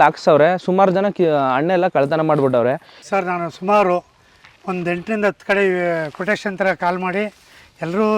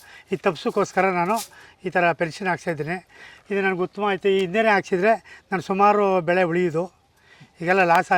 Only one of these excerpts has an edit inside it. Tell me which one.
first; 1 cut; at 2.9 s

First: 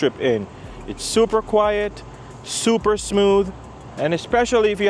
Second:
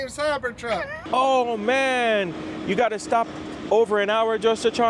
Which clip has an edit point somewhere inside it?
second; 1 cut; at 1.0 s

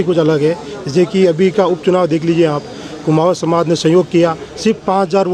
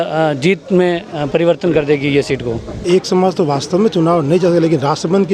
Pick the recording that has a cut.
second; 1 cut; at 2.8 s

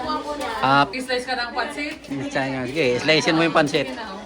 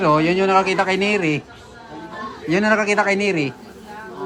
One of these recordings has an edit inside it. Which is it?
first; 1 cut; at 0.9 s

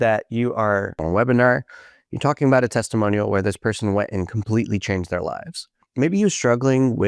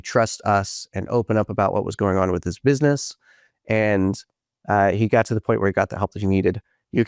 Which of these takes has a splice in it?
first; 2 cuts; at 1.0 s, 5.8 s

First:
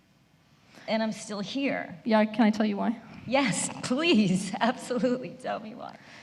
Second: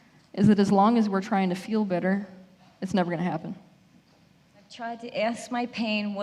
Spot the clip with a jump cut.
second; 1 cut; at 4.8 s

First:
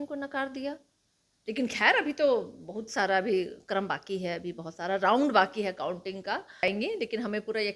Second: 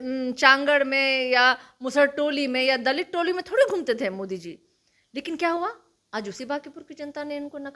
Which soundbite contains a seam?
first; 1 cut; at 6.7 s

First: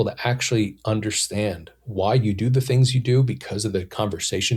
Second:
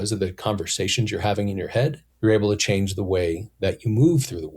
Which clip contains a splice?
second; 1 cut; at 2.1 s

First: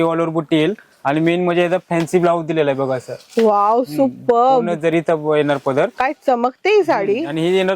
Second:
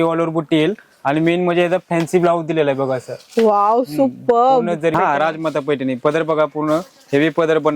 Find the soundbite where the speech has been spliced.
second; 1 cut; at 4.9 s

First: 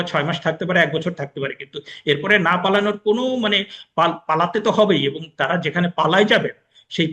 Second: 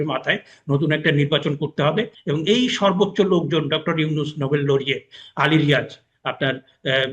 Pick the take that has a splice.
second; 1 cut; at 2.2 s

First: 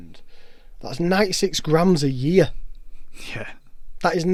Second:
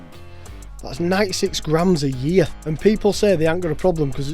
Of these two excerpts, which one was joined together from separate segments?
second; 1 cut; at 2.6 s

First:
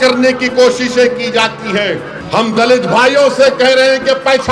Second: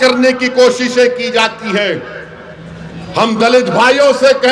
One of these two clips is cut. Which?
first; 1 cut; at 2.1 s

